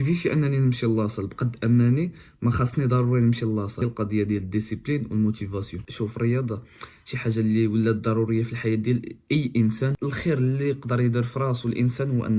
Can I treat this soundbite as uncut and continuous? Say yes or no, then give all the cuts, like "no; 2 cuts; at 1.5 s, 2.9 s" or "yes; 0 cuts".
no; 3 cuts; at 3.8 s, 5.8 s, 9.9 s